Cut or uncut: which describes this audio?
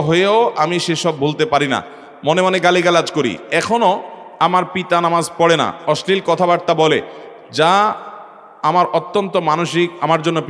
uncut